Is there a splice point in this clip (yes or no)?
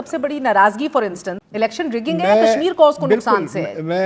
yes